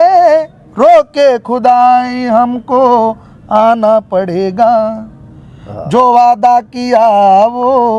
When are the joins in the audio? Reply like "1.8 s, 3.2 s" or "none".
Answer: none